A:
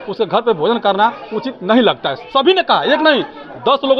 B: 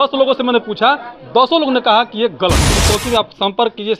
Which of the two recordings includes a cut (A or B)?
B